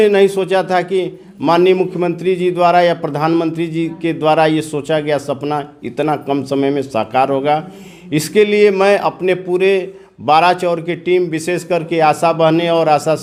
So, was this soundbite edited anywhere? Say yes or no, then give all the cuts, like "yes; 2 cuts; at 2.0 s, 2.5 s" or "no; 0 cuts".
no; 0 cuts